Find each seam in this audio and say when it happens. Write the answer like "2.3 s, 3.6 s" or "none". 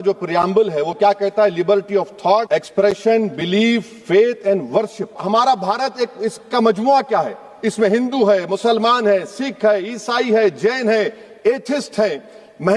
2.5 s, 5.2 s